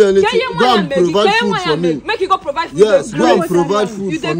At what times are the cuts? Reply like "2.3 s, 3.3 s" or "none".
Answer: none